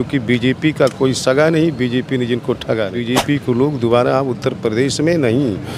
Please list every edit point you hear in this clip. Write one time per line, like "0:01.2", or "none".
0:03.0

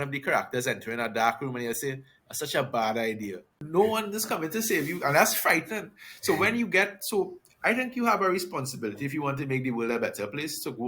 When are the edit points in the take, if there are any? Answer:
0:03.6

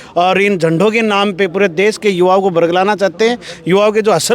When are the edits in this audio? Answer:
none

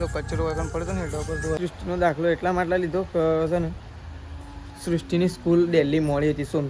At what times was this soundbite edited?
0:01.6

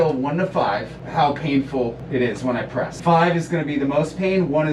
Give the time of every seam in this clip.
0:01.0
0:02.0
0:02.9

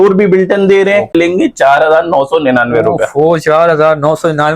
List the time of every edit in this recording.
0:01.1

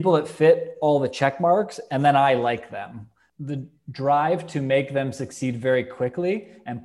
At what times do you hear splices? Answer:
0:03.3

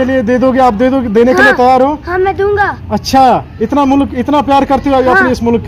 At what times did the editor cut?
none

